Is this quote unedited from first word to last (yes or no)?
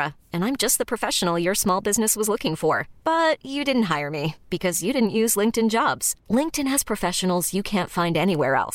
yes